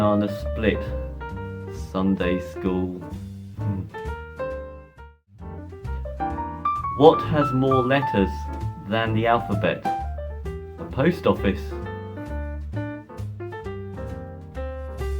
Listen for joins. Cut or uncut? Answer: cut